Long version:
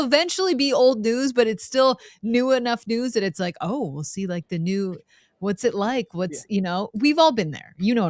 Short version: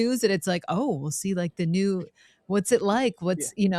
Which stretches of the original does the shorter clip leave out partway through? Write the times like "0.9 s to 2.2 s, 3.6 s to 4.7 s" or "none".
none